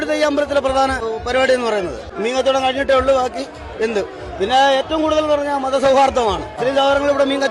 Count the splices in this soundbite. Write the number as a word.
three